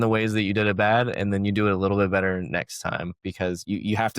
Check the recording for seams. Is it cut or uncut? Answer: cut